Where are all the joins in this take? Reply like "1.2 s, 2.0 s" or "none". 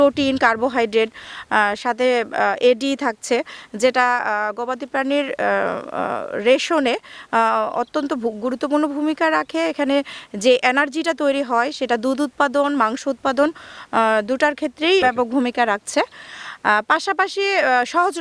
15.0 s